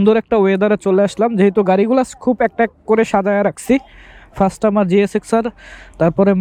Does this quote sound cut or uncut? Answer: uncut